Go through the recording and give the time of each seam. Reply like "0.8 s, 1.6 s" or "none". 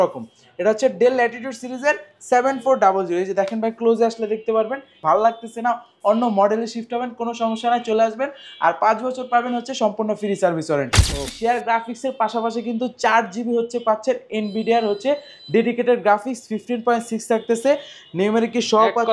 5.0 s, 11.2 s